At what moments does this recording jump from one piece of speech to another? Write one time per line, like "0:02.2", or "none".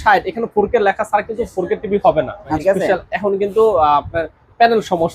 0:02.6